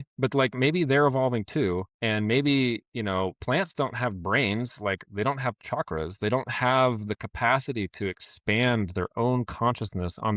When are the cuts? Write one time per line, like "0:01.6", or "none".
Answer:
0:01.9